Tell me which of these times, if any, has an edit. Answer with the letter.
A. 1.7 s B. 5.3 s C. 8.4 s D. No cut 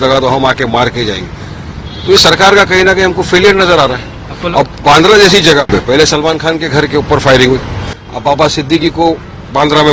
D